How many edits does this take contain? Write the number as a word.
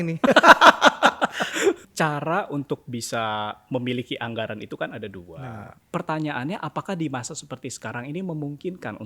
two